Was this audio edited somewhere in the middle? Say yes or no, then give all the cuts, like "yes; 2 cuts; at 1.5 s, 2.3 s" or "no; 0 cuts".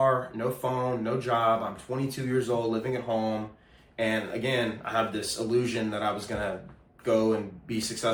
no; 0 cuts